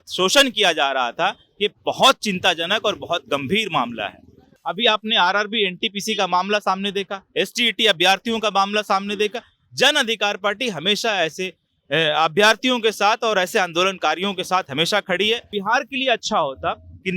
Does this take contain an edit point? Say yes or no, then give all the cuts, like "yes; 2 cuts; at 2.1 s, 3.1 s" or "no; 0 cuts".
yes; 2 cuts; at 4.5 s, 15.5 s